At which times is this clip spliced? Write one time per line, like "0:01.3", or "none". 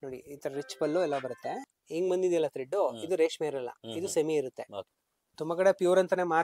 0:01.7
0:04.8